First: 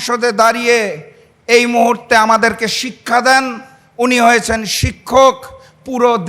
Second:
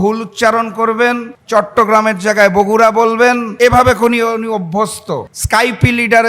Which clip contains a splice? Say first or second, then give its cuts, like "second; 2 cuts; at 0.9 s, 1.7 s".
second; 3 cuts; at 1.3 s, 3.5 s, 5.3 s